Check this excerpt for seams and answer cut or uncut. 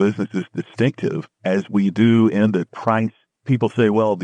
cut